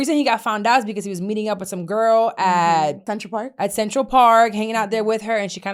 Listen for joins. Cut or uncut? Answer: cut